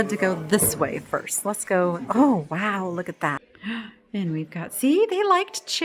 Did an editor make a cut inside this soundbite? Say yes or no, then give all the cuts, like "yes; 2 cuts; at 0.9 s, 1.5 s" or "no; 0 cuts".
yes; 1 cut; at 3.5 s